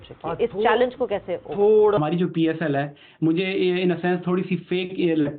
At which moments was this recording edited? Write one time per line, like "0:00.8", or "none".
0:02.0